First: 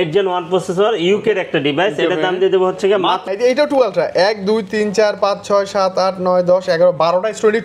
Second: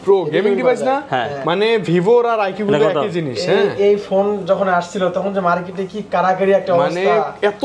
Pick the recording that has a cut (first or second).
first